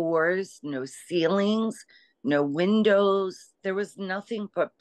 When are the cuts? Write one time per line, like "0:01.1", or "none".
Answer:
0:03.5